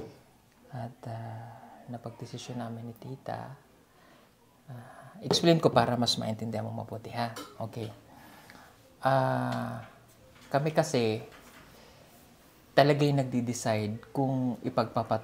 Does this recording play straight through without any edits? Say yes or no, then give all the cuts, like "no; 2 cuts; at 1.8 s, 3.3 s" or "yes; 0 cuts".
yes; 0 cuts